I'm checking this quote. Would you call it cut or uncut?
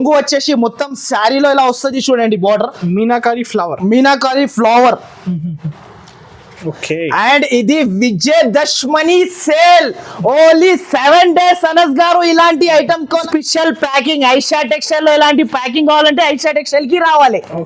cut